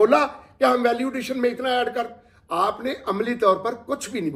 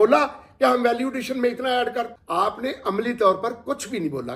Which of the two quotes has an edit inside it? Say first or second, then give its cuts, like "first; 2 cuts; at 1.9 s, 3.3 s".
second; 1 cut; at 2.2 s